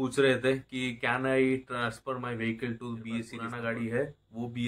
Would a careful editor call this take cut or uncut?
cut